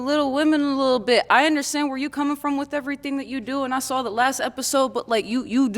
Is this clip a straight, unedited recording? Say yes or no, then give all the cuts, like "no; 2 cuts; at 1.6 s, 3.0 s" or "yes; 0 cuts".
no; 1 cut; at 3.0 s